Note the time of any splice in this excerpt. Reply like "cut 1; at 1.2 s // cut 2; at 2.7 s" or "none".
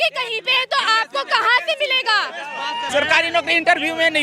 cut 1; at 2.8 s